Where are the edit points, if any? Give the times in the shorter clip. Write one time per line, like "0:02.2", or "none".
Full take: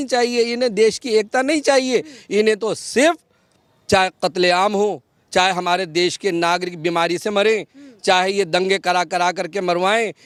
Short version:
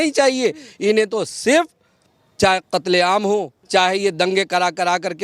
0:03.6